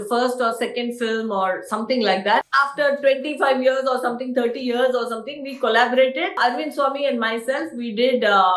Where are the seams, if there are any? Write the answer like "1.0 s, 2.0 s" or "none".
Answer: 2.4 s, 6.3 s